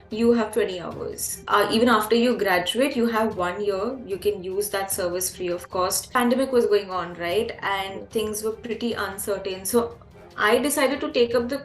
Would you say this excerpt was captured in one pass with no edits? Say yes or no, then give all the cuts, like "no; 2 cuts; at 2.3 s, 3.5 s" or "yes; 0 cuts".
no; 2 cuts; at 1.3 s, 6.0 s